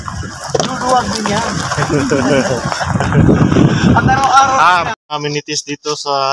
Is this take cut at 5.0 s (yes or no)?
yes